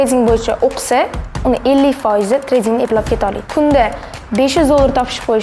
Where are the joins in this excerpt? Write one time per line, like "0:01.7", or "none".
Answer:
0:03.5